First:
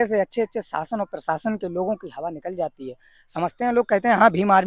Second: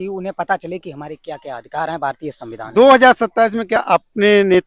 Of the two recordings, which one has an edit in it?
second; 1 cut; at 2.6 s

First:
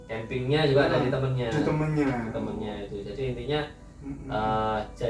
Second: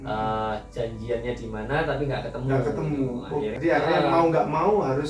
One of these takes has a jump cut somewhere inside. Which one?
second; 1 cut; at 3.5 s

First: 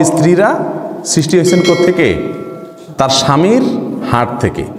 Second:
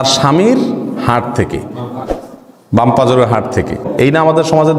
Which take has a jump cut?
second; 1 cut; at 3.9 s

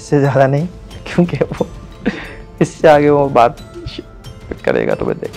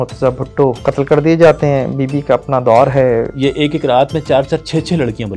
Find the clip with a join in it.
second; 2 cuts; at 0.8 s, 3.3 s

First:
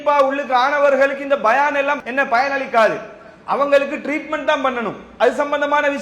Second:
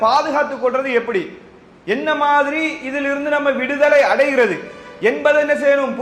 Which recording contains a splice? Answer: first; 1 cut; at 2.0 s

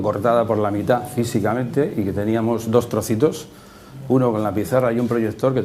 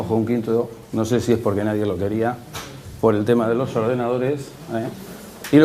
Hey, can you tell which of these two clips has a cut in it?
first; 1 cut; at 2.3 s

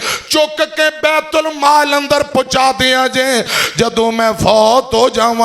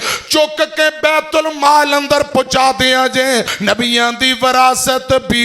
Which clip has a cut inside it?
second; 1 cut; at 3.5 s

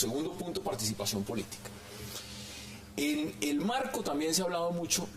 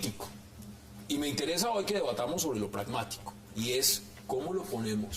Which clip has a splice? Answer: second; 1 cut; at 1.3 s

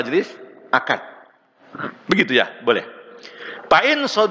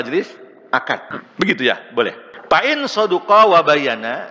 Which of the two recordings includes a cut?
second; 2 cuts; at 1.2 s, 2.3 s

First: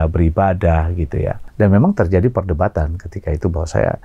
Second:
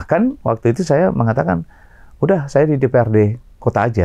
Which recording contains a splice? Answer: first; 1 cut; at 1.4 s

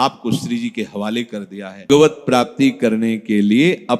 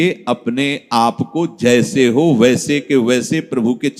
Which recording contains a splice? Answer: first; 1 cut; at 1.9 s

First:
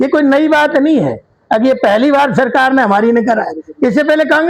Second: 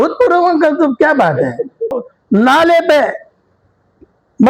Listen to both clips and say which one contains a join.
second; 1 cut; at 2.1 s

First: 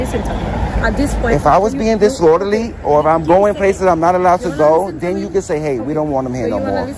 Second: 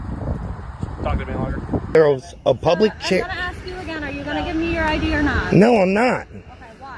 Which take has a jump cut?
second; 1 cut; at 1.9 s

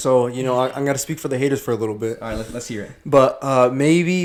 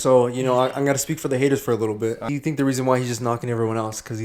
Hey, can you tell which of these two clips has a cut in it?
second; 1 cut; at 2.3 s

